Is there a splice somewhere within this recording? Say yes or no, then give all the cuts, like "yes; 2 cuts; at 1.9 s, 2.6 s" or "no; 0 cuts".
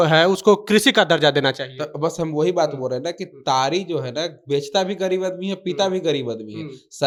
no; 0 cuts